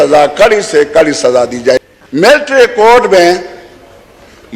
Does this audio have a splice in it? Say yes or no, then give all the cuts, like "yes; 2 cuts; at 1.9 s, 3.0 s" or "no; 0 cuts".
yes; 1 cut; at 1.8 s